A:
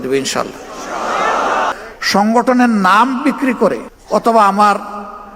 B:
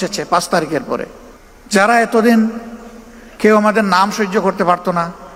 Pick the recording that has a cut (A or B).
A